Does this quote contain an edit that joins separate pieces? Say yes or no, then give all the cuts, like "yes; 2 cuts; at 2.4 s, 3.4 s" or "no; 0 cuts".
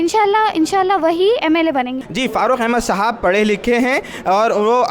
yes; 1 cut; at 2.0 s